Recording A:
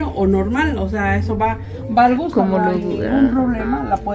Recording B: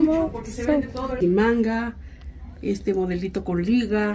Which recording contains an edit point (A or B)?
B